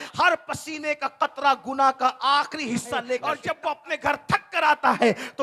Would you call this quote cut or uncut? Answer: cut